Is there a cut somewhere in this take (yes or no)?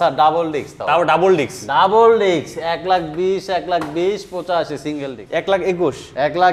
yes